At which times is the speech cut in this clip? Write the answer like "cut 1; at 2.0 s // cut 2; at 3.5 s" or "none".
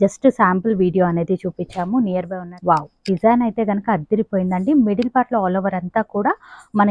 cut 1; at 2.4 s